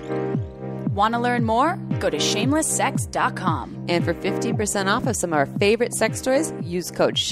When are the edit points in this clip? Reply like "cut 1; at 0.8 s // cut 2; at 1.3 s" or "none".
cut 1; at 0.9 s